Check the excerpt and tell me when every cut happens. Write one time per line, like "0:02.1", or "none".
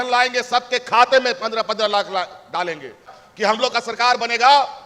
0:03.0